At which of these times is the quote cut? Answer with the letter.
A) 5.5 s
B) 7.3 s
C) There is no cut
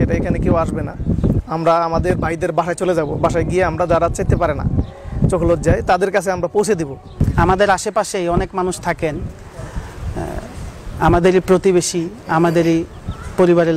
B